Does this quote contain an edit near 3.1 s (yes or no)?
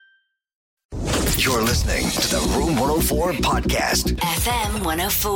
no